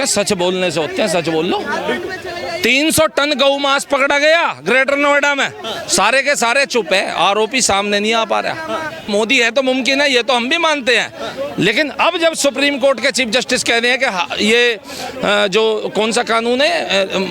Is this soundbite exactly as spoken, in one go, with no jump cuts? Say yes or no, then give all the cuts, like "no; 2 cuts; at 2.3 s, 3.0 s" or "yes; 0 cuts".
no; 1 cut; at 9.1 s